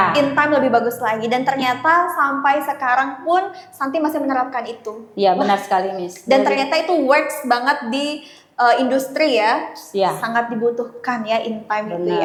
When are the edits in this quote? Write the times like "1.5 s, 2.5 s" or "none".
none